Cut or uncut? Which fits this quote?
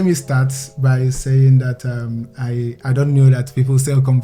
uncut